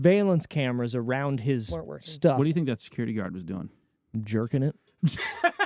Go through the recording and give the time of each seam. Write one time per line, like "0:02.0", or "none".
none